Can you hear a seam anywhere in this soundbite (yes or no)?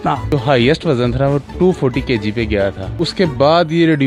no